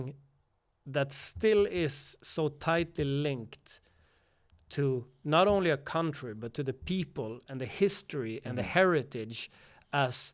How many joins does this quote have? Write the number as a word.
zero